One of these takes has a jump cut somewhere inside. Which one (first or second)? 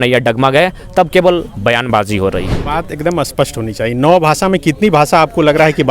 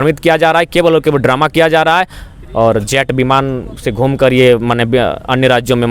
first